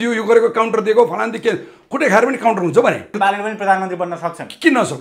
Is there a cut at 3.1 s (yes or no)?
yes